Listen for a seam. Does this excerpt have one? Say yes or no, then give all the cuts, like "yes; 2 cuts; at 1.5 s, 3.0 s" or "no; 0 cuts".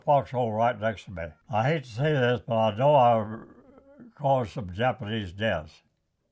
yes; 1 cut; at 1.4 s